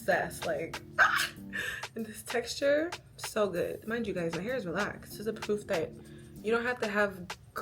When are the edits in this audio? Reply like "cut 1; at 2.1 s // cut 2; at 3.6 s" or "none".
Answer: cut 1; at 3.8 s // cut 2; at 5.0 s